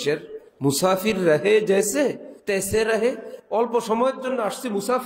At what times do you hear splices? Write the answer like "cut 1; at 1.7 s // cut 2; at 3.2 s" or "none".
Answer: cut 1; at 2.3 s // cut 2; at 3.3 s